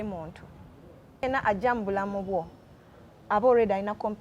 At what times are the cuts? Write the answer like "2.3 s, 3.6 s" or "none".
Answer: 1.2 s

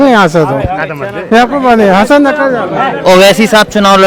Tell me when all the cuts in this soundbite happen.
none

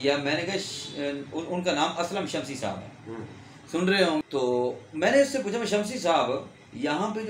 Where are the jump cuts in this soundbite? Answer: 4.2 s

